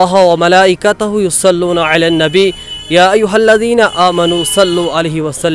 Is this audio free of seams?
yes; 0 cuts

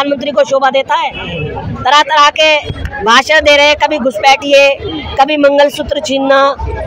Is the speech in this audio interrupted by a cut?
no; 0 cuts

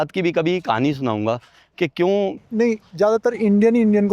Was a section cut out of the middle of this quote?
yes; 1 cut; at 2.4 s

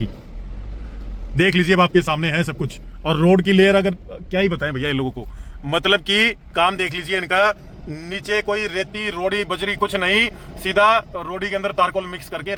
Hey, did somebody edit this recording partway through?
no; 0 cuts

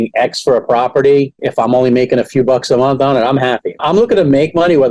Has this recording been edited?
yes; 1 cut; at 3.8 s

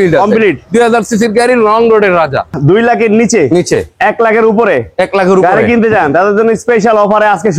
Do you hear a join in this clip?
yes; 1 cut; at 2.5 s

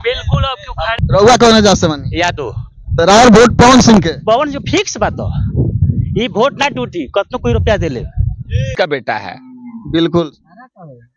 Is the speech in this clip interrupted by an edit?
yes; 2 cuts; at 1.0 s, 8.7 s

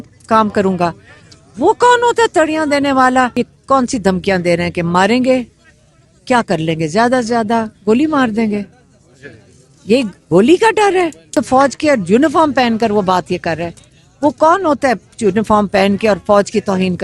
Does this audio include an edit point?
yes; 2 cuts; at 3.3 s, 11.3 s

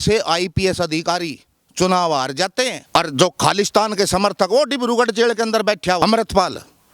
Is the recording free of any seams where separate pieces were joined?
no; 2 cuts; at 2.8 s, 6.0 s

